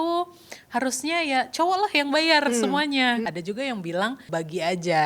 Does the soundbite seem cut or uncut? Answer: cut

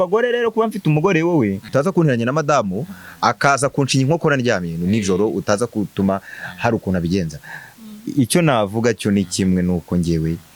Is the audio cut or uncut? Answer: cut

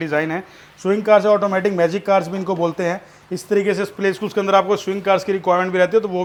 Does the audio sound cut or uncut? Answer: uncut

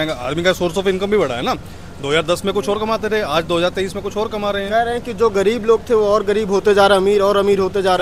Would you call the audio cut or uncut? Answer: uncut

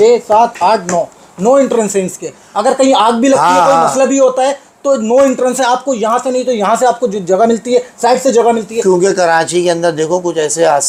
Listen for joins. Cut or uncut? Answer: uncut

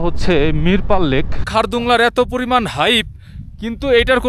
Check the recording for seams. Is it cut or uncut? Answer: cut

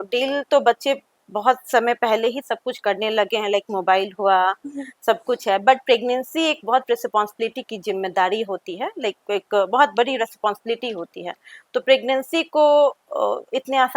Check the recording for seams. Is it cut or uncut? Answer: uncut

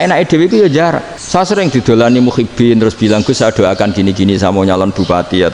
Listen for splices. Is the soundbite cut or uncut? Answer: cut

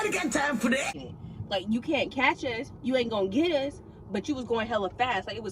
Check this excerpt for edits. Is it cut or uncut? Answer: cut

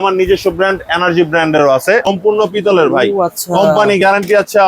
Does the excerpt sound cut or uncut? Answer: cut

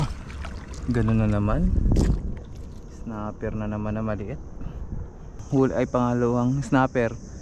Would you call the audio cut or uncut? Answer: cut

